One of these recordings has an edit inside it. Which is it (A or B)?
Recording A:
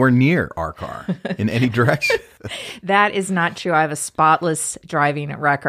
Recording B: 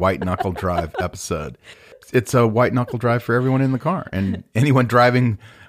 A